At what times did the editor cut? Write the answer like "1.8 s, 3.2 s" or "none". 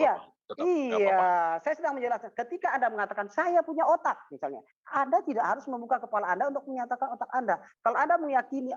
none